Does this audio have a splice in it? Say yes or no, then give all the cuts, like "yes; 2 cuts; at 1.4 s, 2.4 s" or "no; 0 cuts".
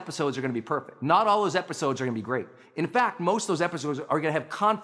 yes; 1 cut; at 0.9 s